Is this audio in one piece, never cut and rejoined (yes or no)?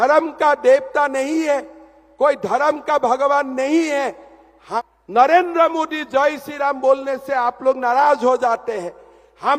no